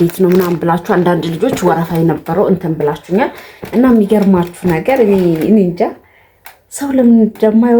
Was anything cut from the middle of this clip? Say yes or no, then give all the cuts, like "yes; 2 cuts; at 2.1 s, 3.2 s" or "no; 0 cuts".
no; 0 cuts